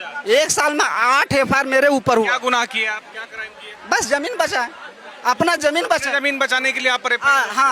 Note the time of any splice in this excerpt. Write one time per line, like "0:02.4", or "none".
none